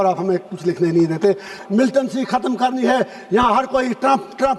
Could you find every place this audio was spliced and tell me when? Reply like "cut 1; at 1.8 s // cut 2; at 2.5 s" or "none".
cut 1; at 1.5 s